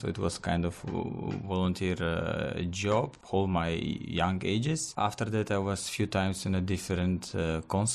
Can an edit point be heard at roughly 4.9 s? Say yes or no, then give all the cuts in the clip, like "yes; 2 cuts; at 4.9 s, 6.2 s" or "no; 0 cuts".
yes; 2 cuts; at 3.2 s, 4.9 s